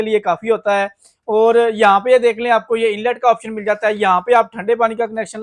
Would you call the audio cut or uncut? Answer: uncut